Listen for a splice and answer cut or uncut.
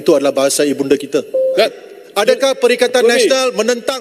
cut